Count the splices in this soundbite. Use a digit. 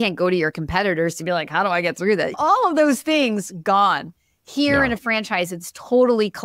0